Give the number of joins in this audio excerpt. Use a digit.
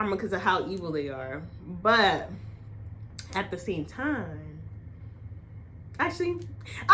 0